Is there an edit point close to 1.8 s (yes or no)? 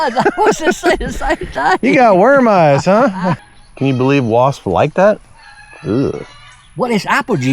no